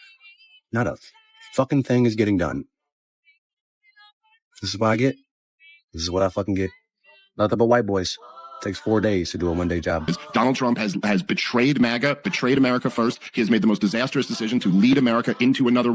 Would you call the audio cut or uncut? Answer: cut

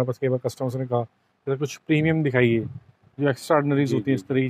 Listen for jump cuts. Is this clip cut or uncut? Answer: uncut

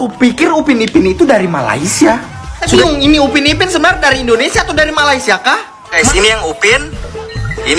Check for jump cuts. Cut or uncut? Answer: cut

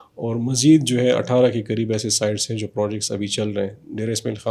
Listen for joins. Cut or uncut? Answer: uncut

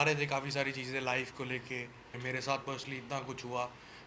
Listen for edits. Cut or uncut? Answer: cut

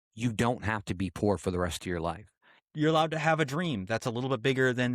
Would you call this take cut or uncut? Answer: cut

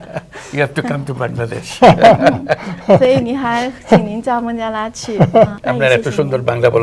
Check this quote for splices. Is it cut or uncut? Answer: cut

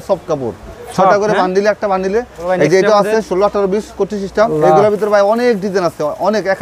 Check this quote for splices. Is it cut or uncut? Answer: cut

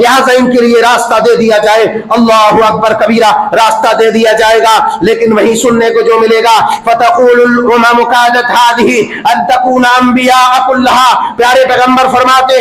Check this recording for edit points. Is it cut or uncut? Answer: uncut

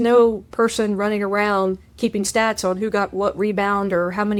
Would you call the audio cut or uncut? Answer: uncut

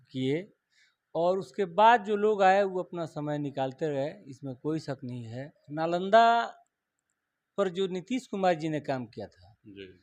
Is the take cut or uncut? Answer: cut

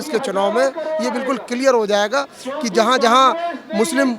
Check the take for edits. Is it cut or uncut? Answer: uncut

